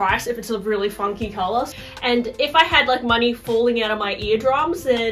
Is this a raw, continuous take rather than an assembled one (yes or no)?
no